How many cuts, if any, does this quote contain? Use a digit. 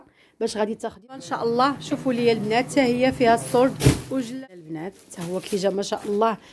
2